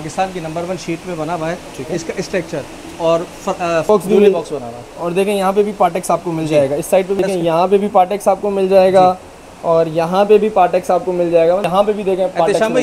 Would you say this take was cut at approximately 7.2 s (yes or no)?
yes